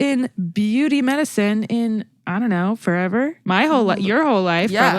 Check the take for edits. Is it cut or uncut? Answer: uncut